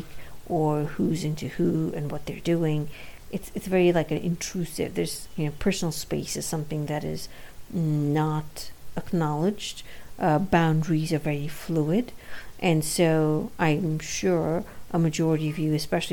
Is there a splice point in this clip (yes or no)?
no